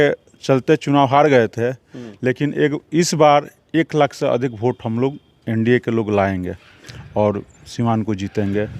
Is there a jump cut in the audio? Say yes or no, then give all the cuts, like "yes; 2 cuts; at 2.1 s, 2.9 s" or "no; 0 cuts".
no; 0 cuts